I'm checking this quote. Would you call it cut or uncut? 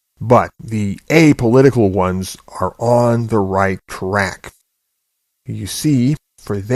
cut